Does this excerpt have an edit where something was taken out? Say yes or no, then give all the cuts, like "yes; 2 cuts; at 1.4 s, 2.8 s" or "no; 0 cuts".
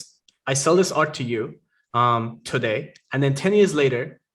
no; 0 cuts